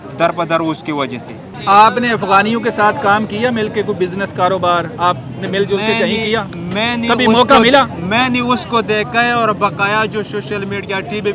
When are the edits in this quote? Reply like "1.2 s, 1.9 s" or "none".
none